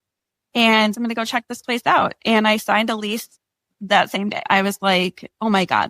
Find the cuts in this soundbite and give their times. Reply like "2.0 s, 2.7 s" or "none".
1.0 s, 4.5 s